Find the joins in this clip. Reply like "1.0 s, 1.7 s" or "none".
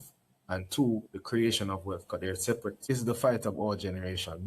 2.9 s

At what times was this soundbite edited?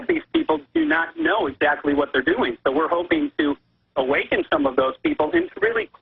none

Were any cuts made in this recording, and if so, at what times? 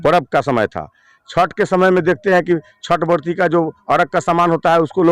none

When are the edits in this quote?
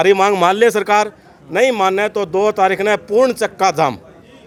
none

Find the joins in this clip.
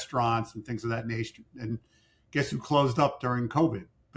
none

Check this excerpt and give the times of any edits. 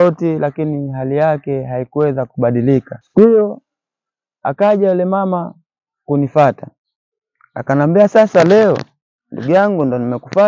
3.0 s

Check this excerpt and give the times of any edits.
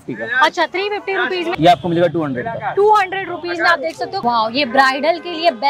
1.5 s, 4.2 s

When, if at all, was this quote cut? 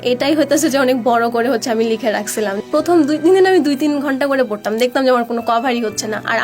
2.6 s

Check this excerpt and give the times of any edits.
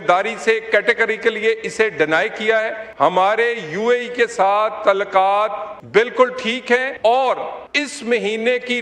2.8 s, 5.7 s, 6.9 s, 7.6 s

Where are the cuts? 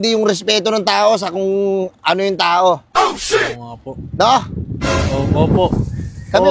none

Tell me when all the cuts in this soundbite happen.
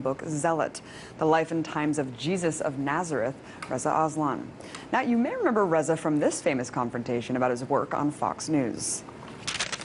none

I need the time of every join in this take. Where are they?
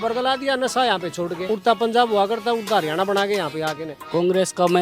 1.4 s, 3.9 s

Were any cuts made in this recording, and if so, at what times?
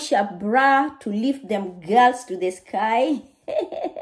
none

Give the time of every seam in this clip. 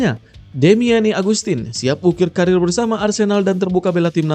none

